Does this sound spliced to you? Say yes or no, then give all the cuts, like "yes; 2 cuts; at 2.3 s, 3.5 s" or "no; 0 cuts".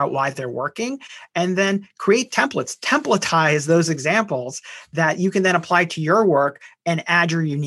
no; 0 cuts